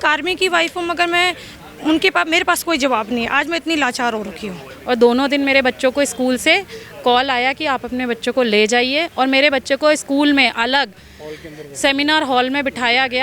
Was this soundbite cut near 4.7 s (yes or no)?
yes